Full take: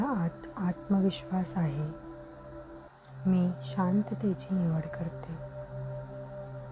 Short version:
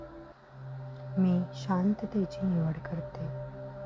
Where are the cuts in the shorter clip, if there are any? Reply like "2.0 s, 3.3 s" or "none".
2.9 s